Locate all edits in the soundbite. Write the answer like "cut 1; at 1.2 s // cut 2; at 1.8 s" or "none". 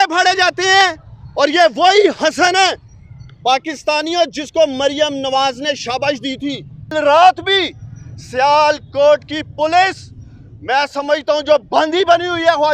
cut 1; at 6.9 s